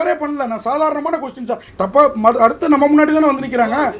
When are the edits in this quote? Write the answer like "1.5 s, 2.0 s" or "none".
1.6 s